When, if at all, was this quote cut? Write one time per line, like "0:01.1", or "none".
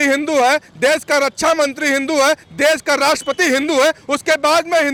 none